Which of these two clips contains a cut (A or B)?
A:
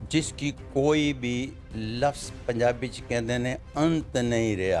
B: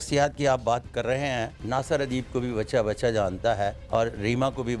B